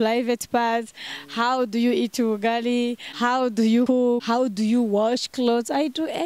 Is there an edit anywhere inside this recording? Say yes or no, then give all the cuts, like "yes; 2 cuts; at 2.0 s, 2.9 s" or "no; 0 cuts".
yes; 2 cuts; at 3.0 s, 3.9 s